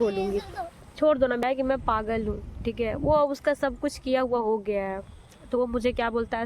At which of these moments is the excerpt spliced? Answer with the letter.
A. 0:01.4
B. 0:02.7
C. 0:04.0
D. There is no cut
A